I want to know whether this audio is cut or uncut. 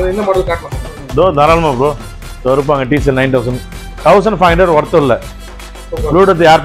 cut